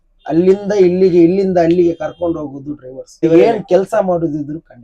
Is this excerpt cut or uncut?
cut